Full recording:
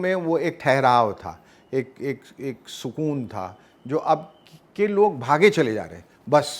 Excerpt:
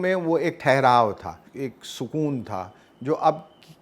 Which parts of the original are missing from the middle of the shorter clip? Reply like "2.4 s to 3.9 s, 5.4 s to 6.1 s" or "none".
1.5 s to 2.3 s